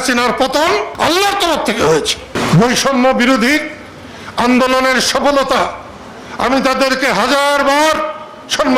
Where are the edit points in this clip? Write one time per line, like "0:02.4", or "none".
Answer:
0:00.9
0:02.4